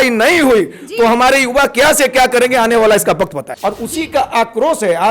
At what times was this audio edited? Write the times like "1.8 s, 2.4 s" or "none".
3.5 s

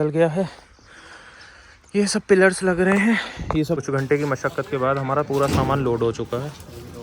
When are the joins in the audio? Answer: 3.8 s

